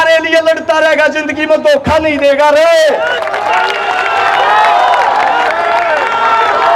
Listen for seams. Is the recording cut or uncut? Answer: uncut